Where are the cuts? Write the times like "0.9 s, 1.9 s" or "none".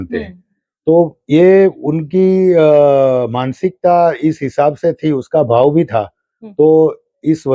none